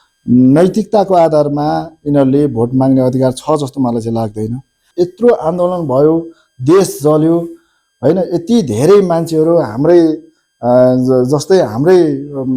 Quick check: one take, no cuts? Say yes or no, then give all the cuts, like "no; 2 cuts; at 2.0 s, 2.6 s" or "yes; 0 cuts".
no; 1 cut; at 4.8 s